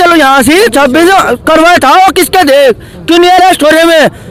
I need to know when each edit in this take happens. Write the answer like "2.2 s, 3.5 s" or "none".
none

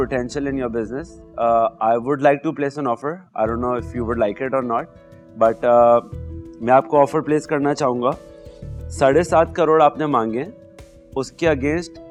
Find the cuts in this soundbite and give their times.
none

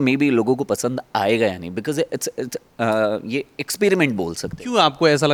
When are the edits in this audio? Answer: none

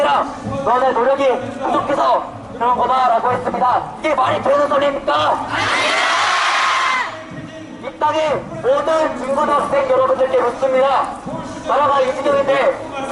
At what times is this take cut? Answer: none

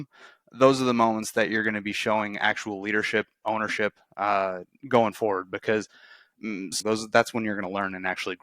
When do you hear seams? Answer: 6.8 s

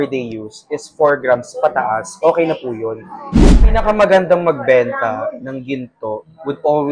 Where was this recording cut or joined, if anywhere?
3.5 s

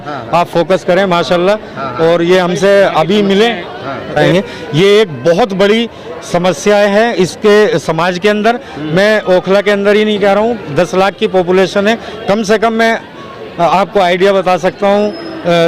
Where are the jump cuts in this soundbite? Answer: 4.2 s

